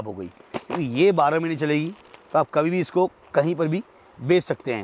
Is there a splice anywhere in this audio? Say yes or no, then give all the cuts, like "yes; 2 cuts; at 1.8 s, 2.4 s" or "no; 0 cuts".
no; 0 cuts